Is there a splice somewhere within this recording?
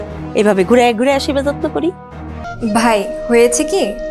yes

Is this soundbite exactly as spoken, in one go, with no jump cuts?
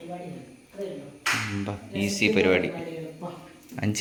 yes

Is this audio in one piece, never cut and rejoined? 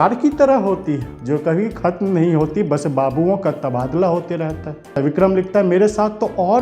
no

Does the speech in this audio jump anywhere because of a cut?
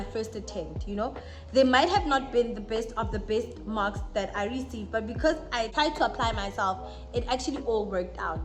yes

